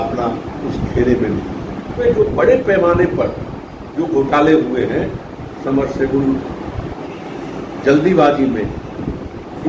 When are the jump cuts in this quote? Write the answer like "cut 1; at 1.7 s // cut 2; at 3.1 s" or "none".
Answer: cut 1; at 2.2 s // cut 2; at 7.0 s